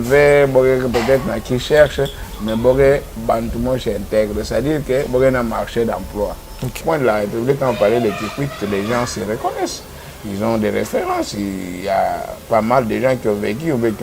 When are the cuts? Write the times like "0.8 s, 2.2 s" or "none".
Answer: 6.8 s